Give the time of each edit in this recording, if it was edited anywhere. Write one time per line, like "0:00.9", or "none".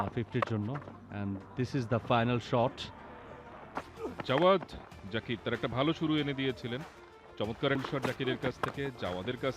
none